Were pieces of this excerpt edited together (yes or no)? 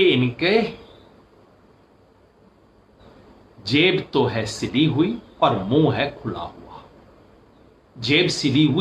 no